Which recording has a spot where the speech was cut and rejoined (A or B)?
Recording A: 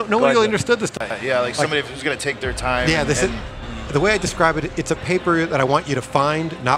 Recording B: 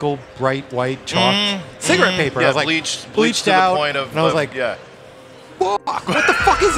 A